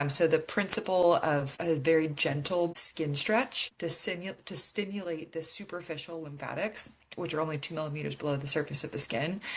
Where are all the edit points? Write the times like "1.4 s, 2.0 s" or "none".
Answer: 1.5 s, 2.8 s, 3.6 s